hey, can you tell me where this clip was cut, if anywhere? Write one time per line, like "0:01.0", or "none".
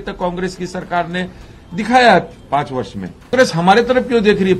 0:03.3

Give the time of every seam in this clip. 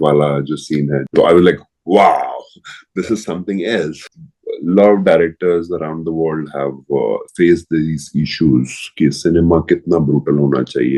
0:01.1
0:04.0

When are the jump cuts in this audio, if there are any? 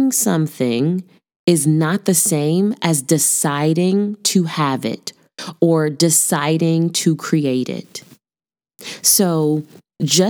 none

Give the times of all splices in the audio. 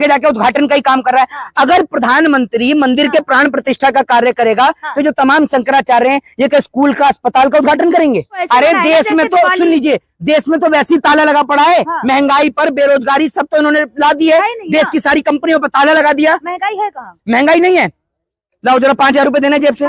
0:08.4

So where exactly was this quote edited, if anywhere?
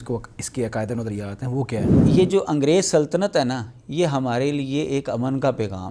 0:02.0

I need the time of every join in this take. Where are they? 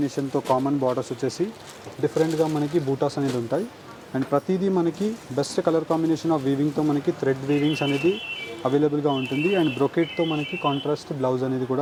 none

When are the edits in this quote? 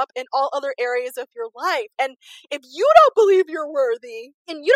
none

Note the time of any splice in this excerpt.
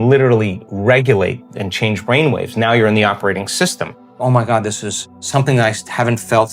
0:04.2

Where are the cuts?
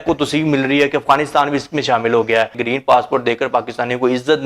0:02.6

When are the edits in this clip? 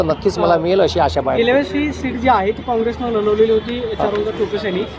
none

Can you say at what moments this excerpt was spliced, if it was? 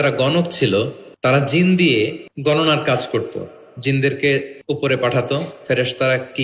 0:01.0
0:02.3
0:04.5

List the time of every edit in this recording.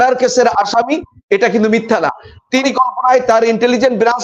0:02.6

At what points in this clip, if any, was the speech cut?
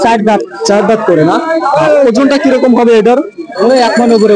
none

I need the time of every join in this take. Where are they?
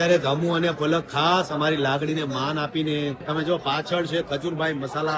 none

